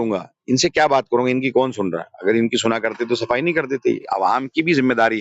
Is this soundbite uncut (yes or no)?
no